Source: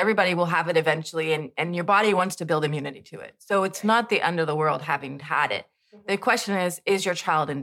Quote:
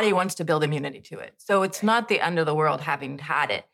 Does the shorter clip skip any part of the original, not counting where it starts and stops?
no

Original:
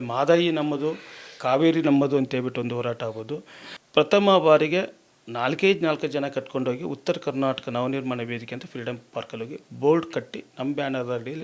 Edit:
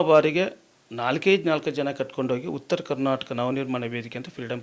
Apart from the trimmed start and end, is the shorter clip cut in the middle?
no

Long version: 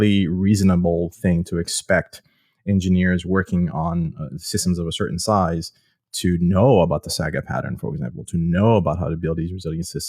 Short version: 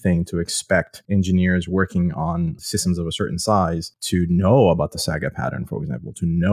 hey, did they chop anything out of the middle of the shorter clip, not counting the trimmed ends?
yes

